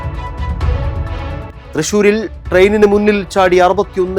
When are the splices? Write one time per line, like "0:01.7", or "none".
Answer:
none